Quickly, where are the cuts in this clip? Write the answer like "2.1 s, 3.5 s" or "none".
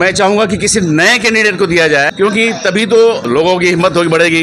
2.1 s, 3.2 s